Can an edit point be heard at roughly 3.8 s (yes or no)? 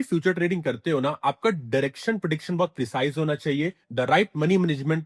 yes